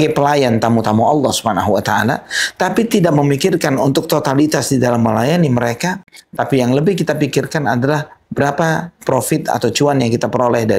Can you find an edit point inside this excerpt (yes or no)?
no